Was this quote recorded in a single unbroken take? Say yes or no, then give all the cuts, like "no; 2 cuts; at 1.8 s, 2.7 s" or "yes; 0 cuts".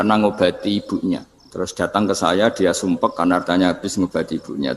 no; 1 cut; at 1.4 s